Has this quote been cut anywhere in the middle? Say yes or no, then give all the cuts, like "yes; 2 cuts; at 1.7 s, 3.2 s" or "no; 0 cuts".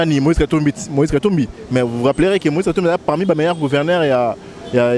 no; 0 cuts